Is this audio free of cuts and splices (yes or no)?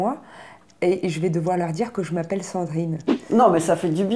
no